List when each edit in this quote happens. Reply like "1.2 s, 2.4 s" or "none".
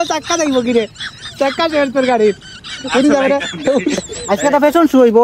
4.2 s